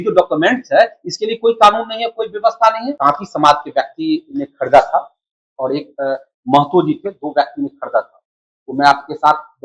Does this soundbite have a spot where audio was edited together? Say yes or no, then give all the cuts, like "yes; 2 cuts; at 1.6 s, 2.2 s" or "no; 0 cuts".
yes; 1 cut; at 3.0 s